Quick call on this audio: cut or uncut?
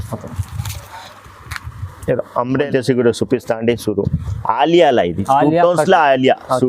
cut